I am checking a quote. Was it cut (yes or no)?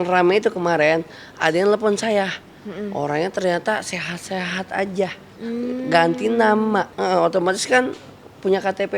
yes